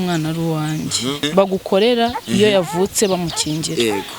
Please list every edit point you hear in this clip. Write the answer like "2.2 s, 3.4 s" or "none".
1.2 s